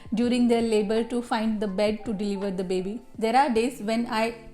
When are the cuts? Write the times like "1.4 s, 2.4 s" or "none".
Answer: 3.0 s